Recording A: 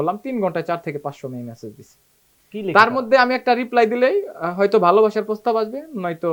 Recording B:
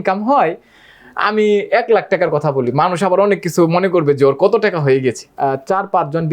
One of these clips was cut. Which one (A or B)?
B